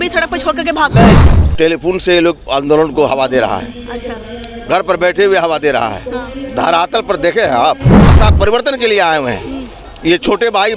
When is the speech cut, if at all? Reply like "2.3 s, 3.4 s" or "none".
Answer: 1.2 s, 8.1 s